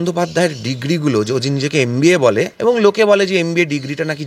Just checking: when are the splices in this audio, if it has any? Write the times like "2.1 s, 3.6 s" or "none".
2.5 s